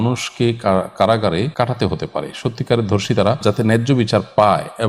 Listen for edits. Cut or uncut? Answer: cut